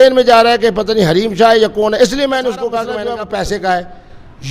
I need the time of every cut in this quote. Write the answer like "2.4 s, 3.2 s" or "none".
2.9 s

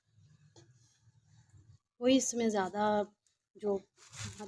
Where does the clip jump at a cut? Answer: 1.9 s

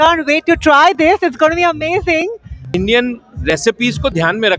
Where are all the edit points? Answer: 2.5 s

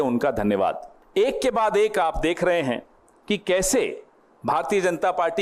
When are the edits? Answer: 0.9 s

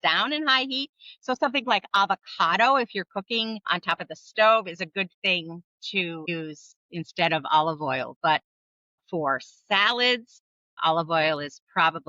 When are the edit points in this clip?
none

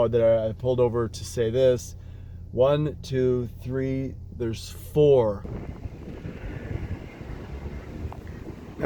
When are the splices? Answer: 5.4 s

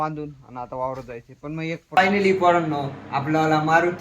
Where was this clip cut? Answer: 1.9 s

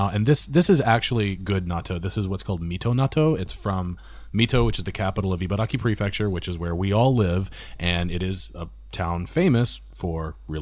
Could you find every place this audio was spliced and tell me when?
none

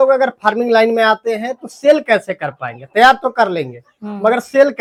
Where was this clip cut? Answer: none

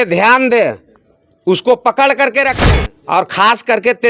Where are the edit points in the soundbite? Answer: 2.6 s

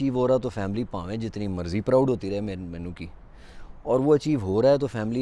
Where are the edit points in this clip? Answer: none

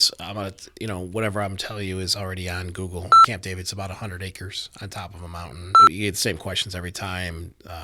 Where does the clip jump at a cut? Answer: 3.2 s, 5.8 s

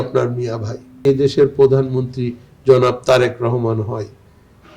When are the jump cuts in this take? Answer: 1.0 s

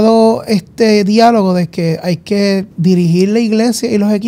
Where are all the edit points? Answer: 2.7 s

